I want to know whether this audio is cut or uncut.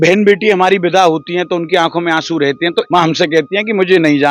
cut